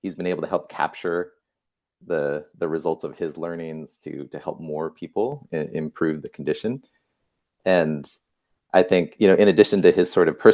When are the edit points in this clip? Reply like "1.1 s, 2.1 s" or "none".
none